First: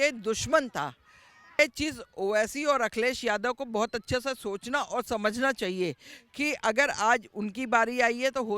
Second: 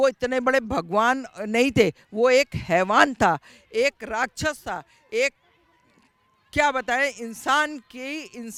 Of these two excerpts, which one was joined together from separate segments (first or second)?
first